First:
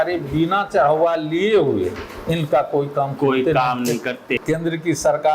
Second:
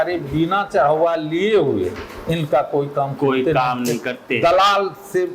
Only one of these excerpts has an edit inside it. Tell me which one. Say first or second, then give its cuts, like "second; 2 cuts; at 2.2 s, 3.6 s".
first; 1 cut; at 4.3 s